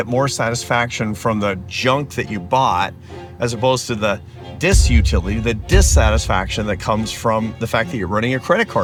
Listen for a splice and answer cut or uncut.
uncut